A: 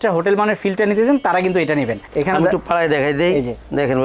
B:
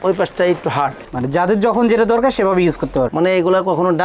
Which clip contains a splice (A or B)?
B